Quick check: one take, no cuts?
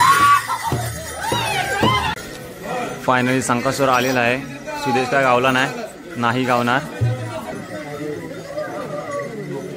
no; 2 cuts; at 2.1 s, 7.5 s

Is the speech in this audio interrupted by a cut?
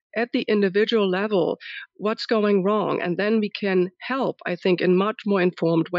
no; 0 cuts

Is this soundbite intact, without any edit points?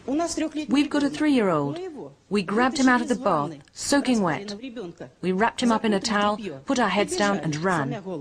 yes; 0 cuts

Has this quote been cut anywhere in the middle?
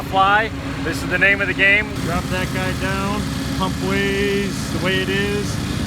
yes; 1 cut; at 2.0 s

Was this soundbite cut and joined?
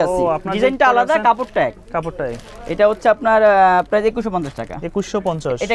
no; 0 cuts

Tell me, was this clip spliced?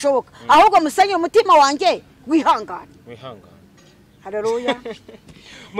no; 0 cuts

